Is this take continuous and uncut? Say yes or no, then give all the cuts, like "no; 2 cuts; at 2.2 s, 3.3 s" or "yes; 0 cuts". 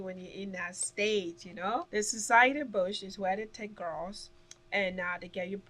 no; 1 cut; at 1.8 s